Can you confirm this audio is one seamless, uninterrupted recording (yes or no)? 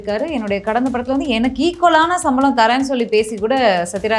yes